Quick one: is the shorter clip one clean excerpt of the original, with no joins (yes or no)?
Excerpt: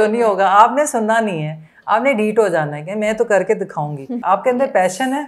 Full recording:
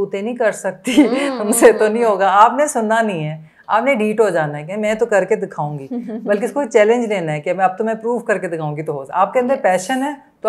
no